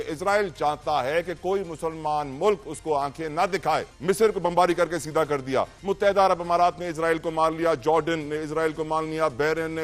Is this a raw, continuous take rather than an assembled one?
no; 2 cuts; at 3.9 s, 5.8 s

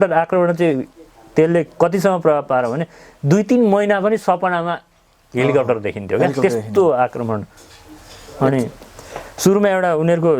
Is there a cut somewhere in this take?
no; 0 cuts

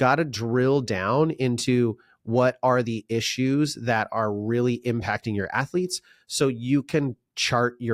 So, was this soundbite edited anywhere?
no; 0 cuts

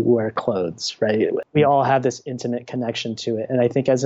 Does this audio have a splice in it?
yes; 1 cut; at 1.4 s

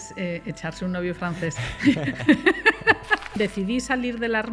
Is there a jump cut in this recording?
yes; 1 cut; at 3.2 s

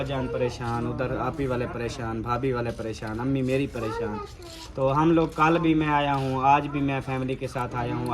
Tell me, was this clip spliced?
no; 0 cuts

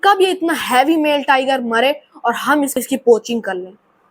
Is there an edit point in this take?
yes; 1 cut; at 2.8 s

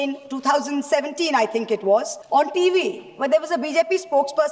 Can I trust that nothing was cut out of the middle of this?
no; 1 cut; at 2.2 s

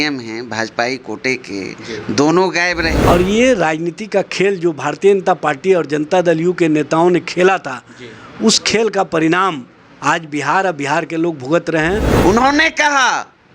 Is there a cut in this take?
yes; 2 cuts; at 3.0 s, 12.1 s

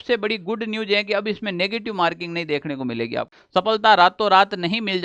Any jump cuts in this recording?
yes; 1 cut; at 3.3 s

